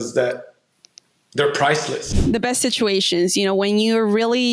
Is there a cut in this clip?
yes; 1 cut; at 2.2 s

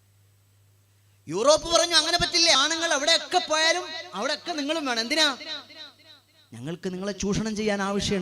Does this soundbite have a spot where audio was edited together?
yes; 1 cut; at 2.6 s

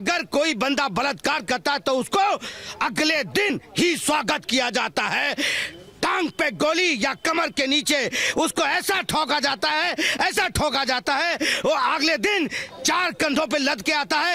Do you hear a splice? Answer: no; 0 cuts

